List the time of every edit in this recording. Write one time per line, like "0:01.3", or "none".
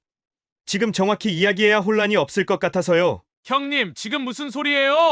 0:03.3